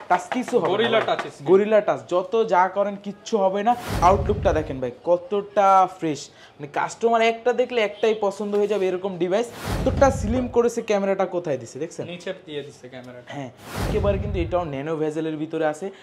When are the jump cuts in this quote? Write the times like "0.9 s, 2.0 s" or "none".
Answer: 4.0 s, 9.8 s, 13.9 s